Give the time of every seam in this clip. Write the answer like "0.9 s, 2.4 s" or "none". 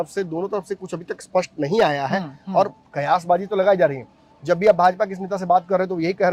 none